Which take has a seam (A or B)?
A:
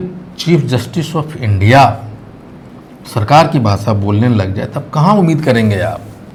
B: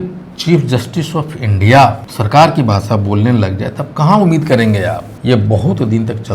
B